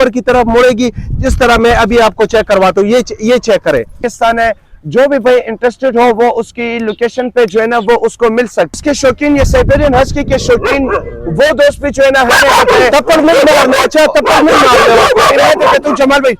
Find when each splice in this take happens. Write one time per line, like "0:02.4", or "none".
0:04.1
0:08.8